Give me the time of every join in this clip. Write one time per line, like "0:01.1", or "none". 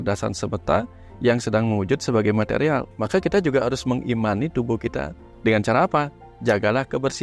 0:02.9
0:05.2